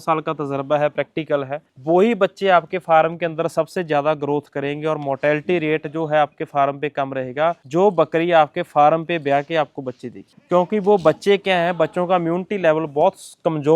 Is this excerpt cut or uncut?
uncut